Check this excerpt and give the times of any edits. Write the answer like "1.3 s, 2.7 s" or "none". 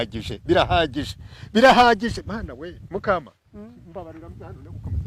none